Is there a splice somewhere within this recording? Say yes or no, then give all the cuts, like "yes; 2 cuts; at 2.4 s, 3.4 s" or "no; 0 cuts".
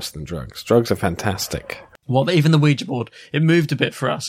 yes; 1 cut; at 1.5 s